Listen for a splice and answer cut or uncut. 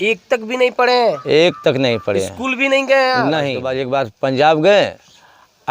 cut